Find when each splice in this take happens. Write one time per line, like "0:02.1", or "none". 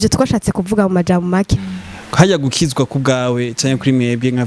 0:01.5